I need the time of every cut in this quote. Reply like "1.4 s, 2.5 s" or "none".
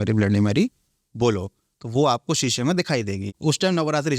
3.3 s